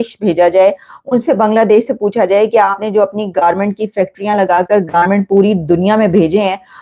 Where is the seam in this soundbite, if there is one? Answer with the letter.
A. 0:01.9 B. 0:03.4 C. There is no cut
C